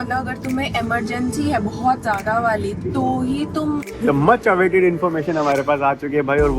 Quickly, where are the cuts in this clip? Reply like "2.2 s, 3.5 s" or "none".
3.9 s